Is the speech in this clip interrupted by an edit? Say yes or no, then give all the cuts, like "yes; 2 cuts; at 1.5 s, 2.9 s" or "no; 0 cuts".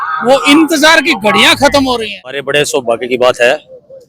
yes; 1 cut; at 2.5 s